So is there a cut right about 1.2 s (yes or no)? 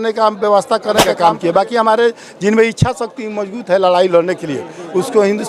yes